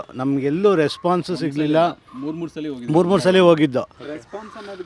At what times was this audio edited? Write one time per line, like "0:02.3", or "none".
none

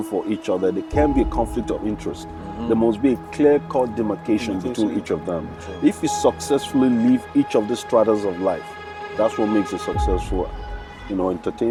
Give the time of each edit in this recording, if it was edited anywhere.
none

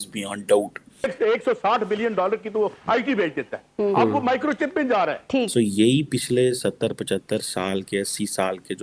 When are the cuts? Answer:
0:01.1
0:05.5

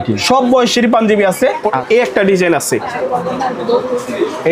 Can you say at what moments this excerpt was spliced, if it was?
0:01.7

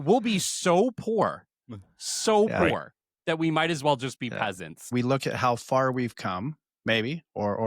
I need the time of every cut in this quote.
0:04.9

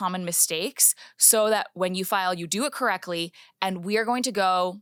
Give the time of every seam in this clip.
none

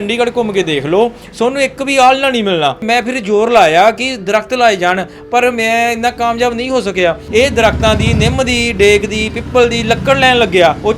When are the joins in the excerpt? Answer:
0:02.8
0:07.2

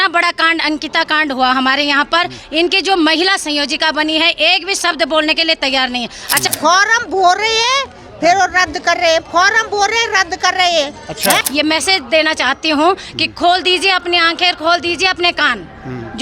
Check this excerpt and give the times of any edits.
0:06.5
0:11.4

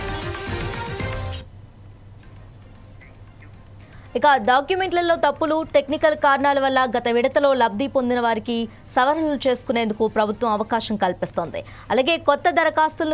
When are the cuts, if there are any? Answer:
0:01.2

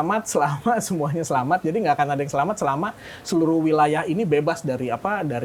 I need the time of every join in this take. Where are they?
none

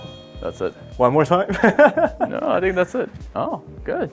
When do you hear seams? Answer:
0:03.2

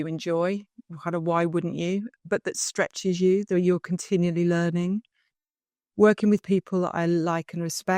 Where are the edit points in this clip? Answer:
0:02.1

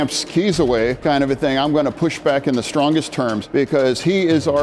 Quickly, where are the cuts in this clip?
0:01.0
0:03.4

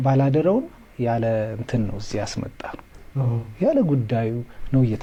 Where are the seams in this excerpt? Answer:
none

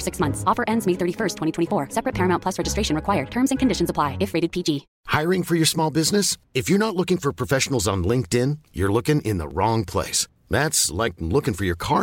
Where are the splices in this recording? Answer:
none

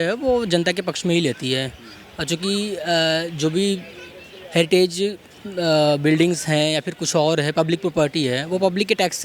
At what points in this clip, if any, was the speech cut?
none

